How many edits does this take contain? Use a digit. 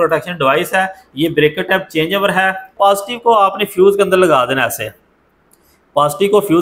1